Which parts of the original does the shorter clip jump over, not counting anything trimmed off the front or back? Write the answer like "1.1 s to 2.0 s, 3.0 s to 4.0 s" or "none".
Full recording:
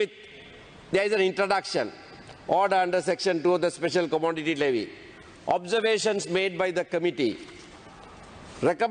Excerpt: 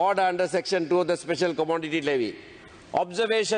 none